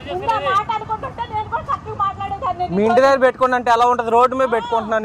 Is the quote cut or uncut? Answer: uncut